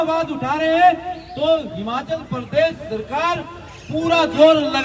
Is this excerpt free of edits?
yes; 0 cuts

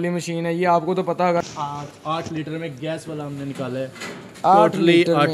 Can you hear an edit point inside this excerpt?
yes; 1 cut; at 1.4 s

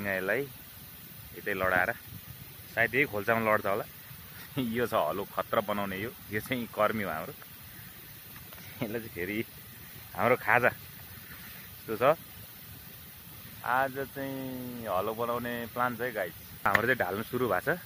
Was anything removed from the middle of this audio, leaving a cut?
yes; 1 cut; at 16.7 s

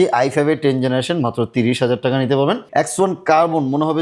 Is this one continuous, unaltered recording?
no; 1 cut; at 2.7 s

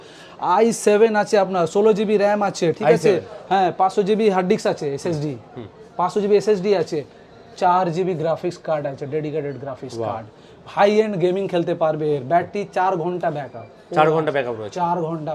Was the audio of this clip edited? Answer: no; 0 cuts

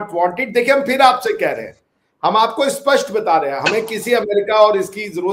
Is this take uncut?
yes; 0 cuts

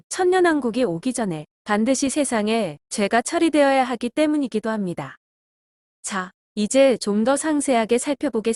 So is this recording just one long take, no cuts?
yes; 0 cuts

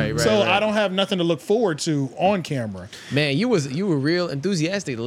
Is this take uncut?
yes; 0 cuts

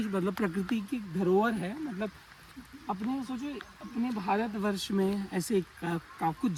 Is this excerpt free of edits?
yes; 0 cuts

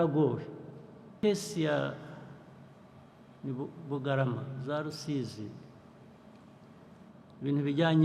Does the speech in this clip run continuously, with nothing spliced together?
no; 1 cut; at 1.1 s

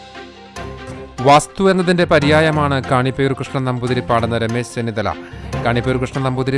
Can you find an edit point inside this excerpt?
no; 0 cuts

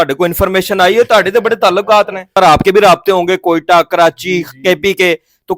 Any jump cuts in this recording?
yes; 1 cut; at 2.3 s

